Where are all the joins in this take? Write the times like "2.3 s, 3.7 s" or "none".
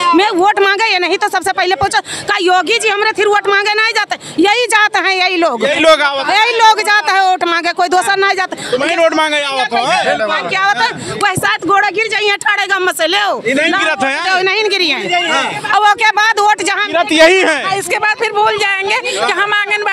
none